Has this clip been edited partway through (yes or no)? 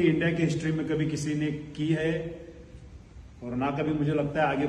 no